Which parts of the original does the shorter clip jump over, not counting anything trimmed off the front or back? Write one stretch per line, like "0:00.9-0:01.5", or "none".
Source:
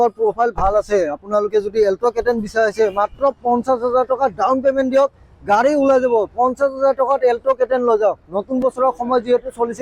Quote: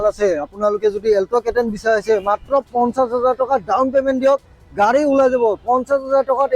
none